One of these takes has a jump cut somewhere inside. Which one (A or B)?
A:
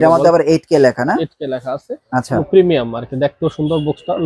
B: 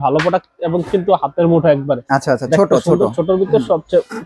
A